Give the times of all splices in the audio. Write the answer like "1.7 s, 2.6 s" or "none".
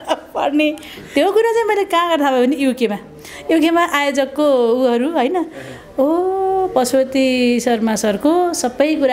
none